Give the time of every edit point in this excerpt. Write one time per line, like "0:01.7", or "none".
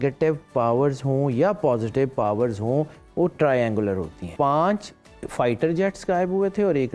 0:04.3